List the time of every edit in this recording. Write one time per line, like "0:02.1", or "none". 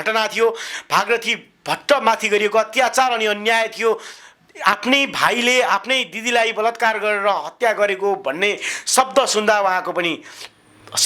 none